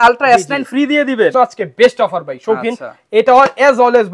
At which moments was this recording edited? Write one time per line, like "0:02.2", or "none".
0:01.3